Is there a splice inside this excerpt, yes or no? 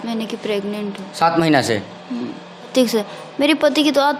yes